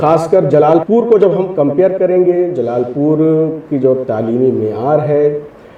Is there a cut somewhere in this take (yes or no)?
no